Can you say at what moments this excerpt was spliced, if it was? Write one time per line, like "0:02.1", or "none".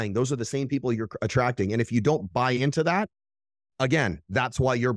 none